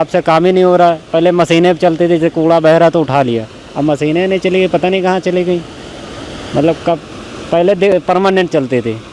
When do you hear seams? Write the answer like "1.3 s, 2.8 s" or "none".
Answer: none